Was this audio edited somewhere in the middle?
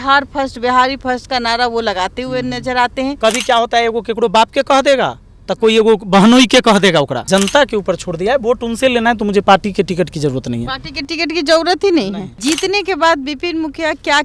yes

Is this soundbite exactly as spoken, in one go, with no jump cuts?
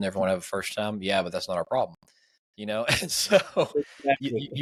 yes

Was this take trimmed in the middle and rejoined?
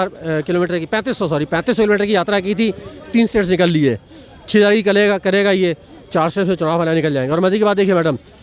no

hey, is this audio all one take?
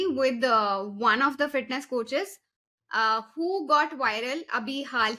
yes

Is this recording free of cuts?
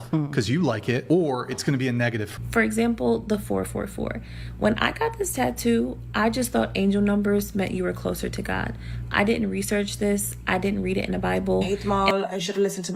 no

